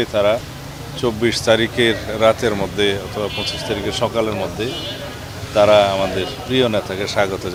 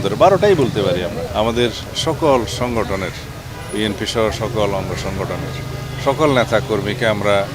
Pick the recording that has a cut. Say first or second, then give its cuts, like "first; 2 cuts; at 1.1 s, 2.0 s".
second; 1 cut; at 1.2 s